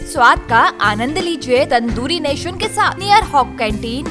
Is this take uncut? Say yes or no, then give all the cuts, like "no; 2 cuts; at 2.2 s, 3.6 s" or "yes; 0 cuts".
no; 2 cuts; at 1.7 s, 3.0 s